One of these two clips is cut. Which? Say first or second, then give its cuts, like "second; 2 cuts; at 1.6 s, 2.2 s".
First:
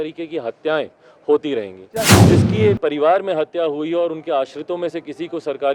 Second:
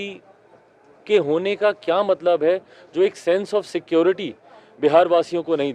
first; 1 cut; at 2.2 s